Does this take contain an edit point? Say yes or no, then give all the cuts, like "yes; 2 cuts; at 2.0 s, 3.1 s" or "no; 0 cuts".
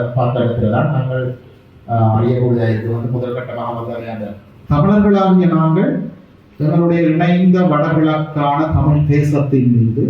yes; 1 cut; at 4.5 s